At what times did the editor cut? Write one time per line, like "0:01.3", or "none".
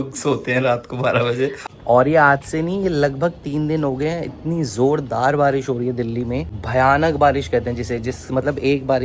0:01.6
0:06.5